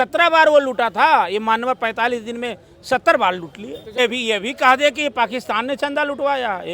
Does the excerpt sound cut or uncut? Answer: cut